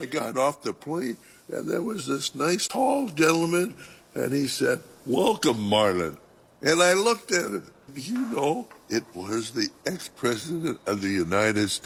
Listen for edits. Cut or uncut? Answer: uncut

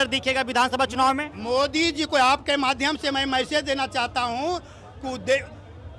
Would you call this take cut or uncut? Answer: uncut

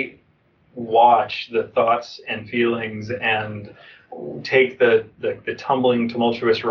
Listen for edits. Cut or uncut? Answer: uncut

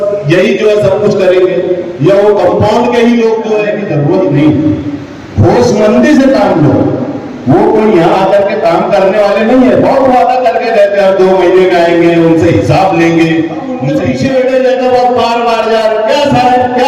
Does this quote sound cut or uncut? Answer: cut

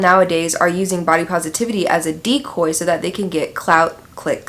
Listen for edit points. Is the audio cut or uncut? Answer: uncut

